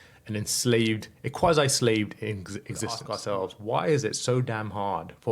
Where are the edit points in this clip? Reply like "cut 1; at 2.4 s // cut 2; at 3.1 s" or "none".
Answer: cut 1; at 3.1 s